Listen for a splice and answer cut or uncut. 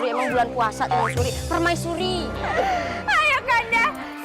cut